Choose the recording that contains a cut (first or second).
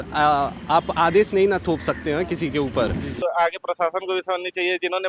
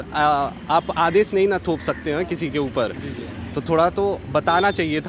first